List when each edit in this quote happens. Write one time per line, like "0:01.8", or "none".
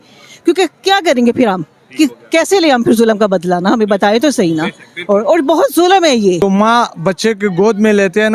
0:06.4

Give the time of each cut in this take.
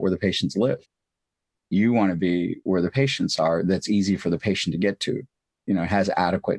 none

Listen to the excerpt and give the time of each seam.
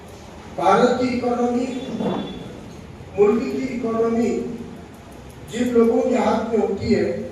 none

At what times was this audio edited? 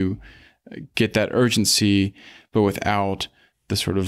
none

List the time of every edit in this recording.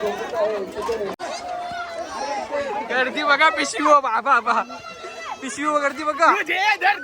0:01.2

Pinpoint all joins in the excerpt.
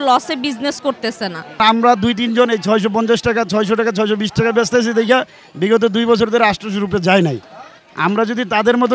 0:01.6

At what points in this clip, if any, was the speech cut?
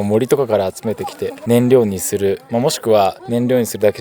0:01.3
0:02.4
0:03.2

